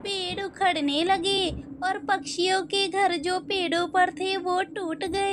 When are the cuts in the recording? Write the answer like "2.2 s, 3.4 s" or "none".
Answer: none